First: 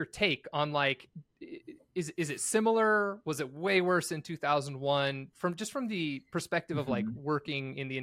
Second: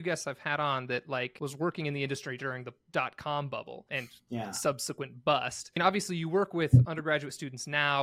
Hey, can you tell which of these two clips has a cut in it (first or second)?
second